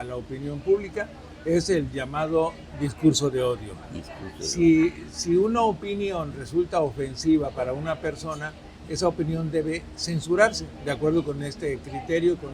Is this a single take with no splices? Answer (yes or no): yes